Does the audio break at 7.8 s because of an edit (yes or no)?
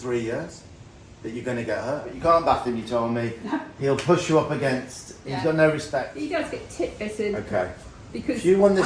no